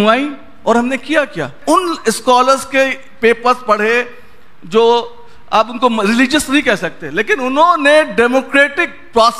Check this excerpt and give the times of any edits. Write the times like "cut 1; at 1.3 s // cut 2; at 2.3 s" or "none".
cut 1; at 1.5 s